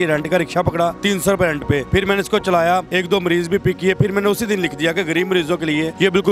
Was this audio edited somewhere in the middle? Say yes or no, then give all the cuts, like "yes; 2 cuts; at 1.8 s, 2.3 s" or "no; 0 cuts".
no; 0 cuts